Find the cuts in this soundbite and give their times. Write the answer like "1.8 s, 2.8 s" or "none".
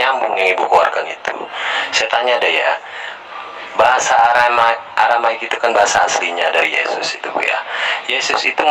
none